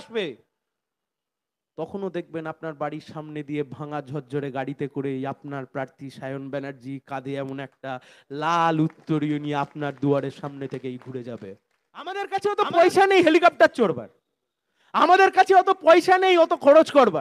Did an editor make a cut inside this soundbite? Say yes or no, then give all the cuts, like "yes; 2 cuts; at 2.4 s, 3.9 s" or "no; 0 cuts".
yes; 1 cut; at 12.2 s